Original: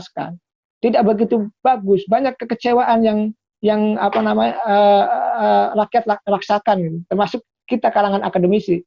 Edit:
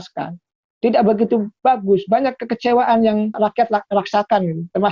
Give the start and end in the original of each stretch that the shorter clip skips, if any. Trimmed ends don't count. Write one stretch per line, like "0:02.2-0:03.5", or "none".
0:03.3-0:05.7